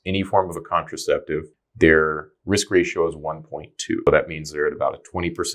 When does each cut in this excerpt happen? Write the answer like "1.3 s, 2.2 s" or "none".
1.6 s, 4.1 s

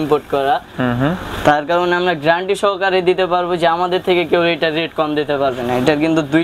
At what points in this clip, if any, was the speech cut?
none

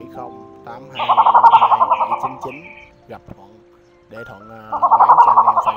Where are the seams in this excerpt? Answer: 1.0 s, 2.7 s, 4.7 s

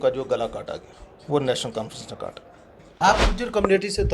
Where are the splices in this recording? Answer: 3.0 s

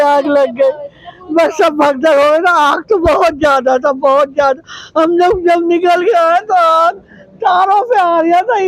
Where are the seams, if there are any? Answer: none

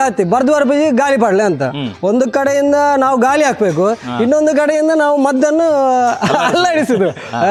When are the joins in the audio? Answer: none

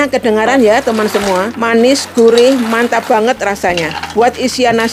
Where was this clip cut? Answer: 1.5 s, 4.0 s

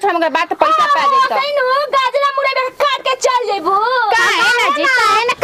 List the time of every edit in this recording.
none

